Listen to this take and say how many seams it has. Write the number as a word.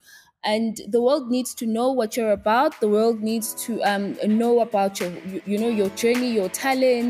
zero